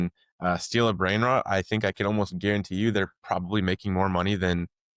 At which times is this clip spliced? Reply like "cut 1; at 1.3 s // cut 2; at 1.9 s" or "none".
none